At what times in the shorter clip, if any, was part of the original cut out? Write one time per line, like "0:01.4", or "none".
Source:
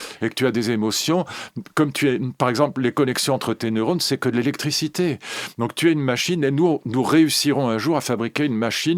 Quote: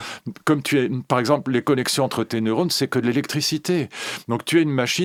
none